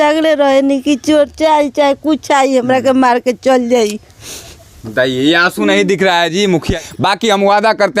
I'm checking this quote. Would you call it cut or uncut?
cut